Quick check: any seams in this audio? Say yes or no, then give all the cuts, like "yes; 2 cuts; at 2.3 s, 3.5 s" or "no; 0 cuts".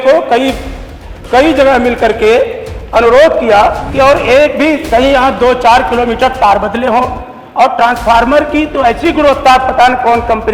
yes; 1 cut; at 3.8 s